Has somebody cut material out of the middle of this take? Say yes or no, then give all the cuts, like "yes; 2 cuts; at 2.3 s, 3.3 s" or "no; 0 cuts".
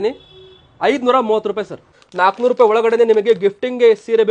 yes; 1 cut; at 2.0 s